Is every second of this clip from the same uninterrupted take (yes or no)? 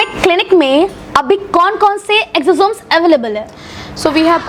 yes